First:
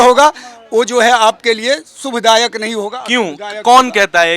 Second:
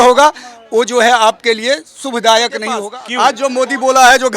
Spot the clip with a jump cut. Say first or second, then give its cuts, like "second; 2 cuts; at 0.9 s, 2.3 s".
second; 1 cut; at 3.0 s